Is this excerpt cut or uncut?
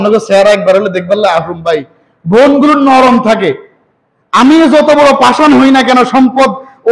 uncut